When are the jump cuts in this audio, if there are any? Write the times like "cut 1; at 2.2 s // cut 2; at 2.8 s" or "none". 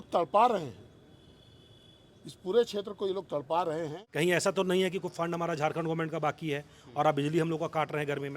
cut 1; at 4.0 s